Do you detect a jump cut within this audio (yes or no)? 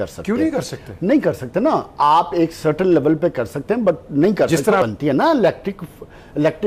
no